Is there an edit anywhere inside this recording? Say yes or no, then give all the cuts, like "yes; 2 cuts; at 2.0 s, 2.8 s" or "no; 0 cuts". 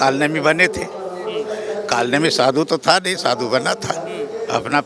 no; 0 cuts